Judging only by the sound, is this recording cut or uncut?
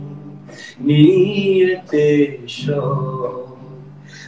uncut